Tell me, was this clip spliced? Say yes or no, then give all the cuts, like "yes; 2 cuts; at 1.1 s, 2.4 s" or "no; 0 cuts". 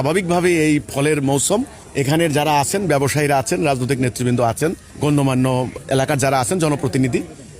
yes; 3 cuts; at 1.8 s, 4.9 s, 5.7 s